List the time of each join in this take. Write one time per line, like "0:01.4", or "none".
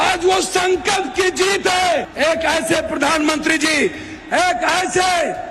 0:02.1